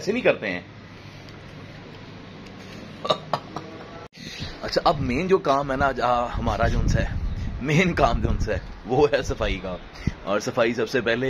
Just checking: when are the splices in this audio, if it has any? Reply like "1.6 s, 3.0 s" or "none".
3.9 s